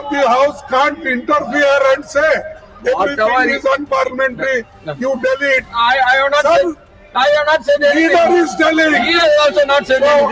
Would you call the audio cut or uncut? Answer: uncut